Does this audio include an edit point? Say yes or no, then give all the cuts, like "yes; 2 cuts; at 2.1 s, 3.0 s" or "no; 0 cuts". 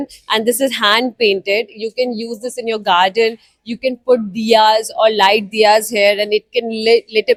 no; 0 cuts